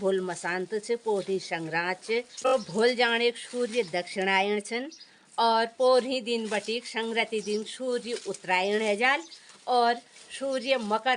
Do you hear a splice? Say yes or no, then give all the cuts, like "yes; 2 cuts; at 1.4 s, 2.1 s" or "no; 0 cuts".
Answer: yes; 1 cut; at 2.5 s